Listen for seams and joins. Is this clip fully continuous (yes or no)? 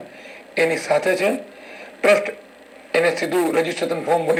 yes